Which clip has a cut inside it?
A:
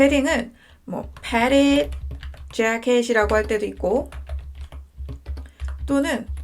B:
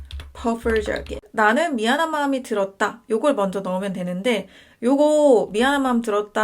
B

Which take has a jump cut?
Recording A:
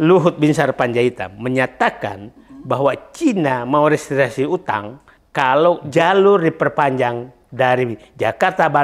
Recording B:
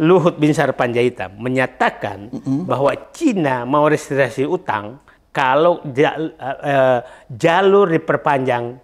A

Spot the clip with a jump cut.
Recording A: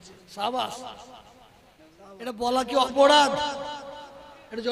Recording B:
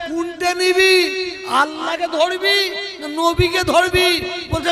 A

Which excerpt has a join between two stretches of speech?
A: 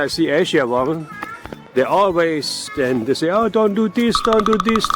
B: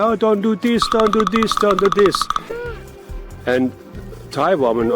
B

